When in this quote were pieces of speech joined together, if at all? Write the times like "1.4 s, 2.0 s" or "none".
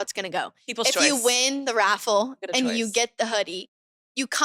none